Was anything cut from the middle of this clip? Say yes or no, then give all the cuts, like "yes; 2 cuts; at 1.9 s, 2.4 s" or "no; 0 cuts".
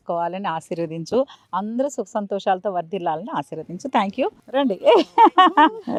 no; 0 cuts